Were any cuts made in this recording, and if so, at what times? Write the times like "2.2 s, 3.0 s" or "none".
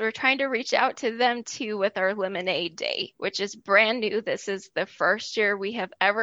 3.1 s